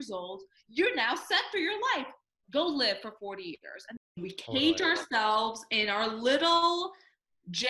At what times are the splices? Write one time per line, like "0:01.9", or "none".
0:04.1